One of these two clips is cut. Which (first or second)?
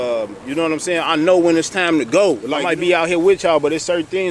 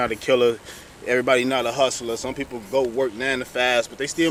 first